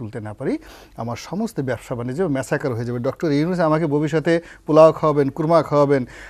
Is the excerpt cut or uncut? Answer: uncut